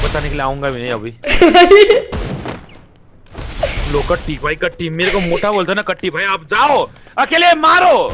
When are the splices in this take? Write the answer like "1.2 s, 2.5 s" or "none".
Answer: none